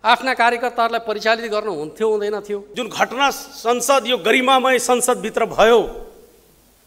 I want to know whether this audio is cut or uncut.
cut